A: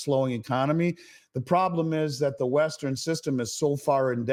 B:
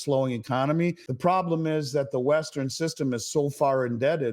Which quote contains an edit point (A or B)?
B